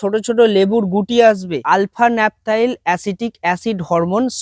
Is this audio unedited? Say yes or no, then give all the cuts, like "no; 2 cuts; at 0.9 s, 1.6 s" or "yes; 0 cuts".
no; 1 cut; at 1.6 s